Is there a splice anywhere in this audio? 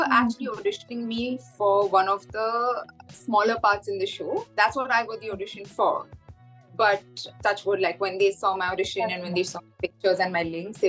no; 0 cuts

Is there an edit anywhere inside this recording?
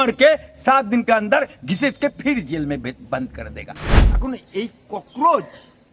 yes; 1 cut; at 3.9 s

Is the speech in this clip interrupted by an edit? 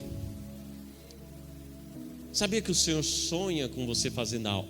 no; 0 cuts

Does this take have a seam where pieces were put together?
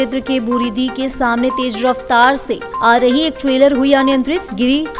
no; 0 cuts

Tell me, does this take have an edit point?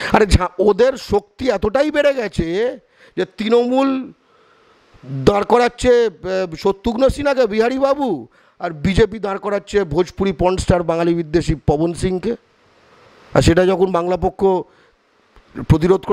no; 0 cuts

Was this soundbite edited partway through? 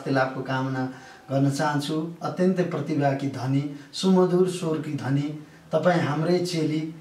no; 0 cuts

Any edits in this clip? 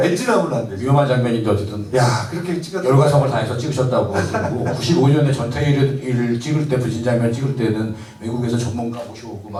no; 0 cuts

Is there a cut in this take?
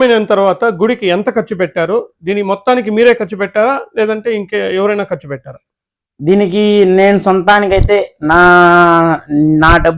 no; 0 cuts

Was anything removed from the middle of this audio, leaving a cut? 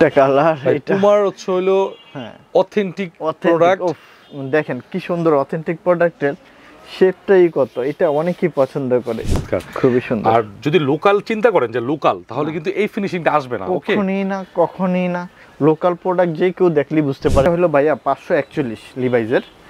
yes; 2 cuts; at 9.4 s, 17.5 s

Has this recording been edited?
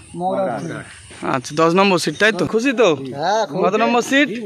yes; 1 cut; at 2.5 s

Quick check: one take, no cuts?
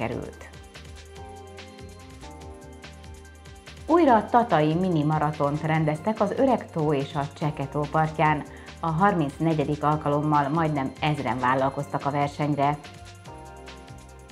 no; 1 cut; at 12.8 s

